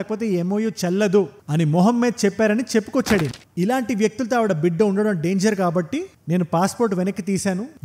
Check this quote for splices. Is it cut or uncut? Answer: cut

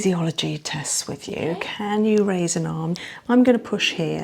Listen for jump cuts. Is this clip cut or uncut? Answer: cut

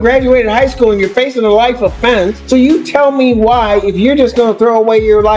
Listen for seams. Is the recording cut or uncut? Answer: cut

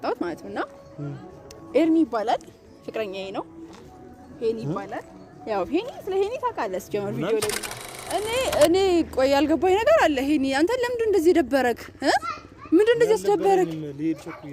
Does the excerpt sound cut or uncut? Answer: cut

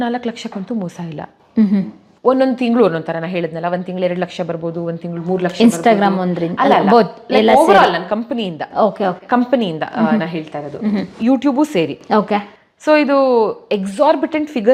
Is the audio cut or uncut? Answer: uncut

